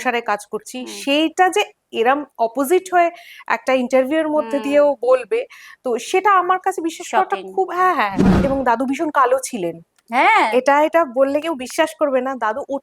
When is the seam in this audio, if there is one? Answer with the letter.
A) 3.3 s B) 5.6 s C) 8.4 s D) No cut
C